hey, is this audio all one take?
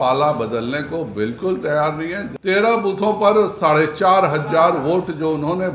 no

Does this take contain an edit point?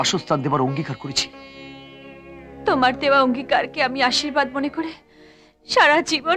no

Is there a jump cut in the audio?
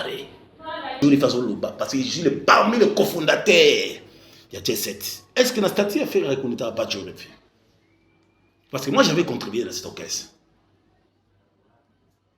yes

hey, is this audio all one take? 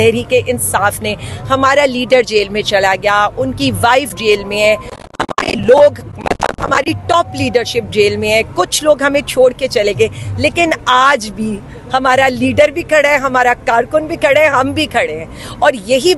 yes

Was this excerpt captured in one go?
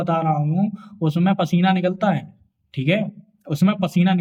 yes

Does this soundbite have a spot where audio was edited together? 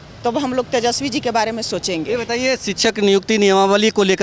no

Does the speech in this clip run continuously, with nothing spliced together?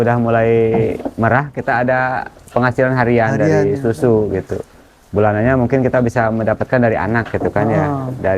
yes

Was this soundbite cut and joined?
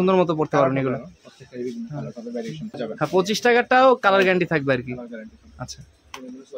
yes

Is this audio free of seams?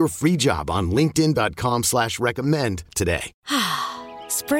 no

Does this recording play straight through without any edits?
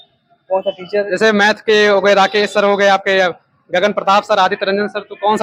yes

